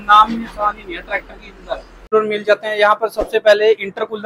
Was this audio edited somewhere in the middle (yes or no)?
yes